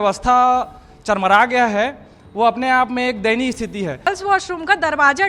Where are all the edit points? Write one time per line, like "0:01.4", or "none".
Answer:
0:04.1